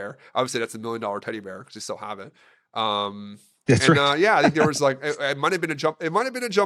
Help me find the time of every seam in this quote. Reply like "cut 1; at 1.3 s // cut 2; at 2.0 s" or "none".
none